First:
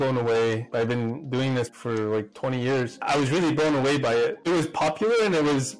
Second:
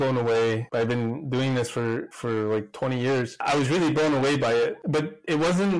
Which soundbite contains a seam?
first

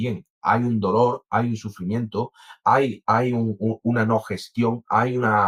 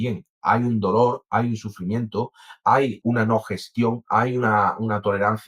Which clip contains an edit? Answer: second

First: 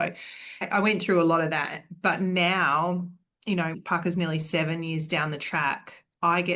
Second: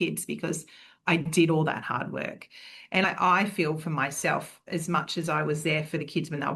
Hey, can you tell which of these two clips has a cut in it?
second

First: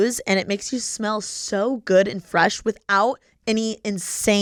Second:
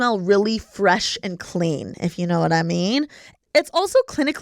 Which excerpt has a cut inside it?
second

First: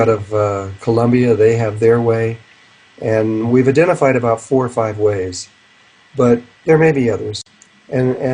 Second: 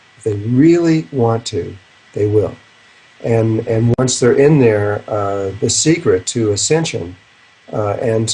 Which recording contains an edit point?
second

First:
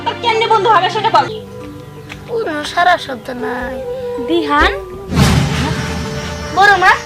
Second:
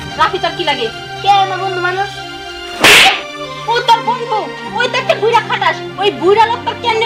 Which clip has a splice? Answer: first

